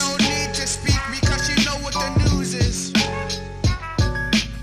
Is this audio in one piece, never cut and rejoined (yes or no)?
yes